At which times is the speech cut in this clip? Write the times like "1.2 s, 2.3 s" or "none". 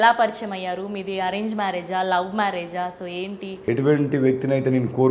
3.5 s